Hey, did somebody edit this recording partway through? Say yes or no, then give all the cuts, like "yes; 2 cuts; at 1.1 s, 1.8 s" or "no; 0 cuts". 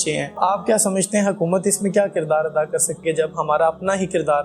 yes; 1 cut; at 3.0 s